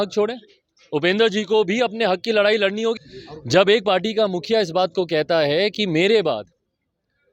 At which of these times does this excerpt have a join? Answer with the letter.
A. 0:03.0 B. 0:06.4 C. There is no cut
A